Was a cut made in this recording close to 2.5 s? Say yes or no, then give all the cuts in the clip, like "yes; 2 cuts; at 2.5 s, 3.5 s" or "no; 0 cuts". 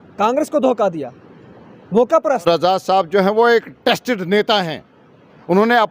yes; 1 cut; at 2.5 s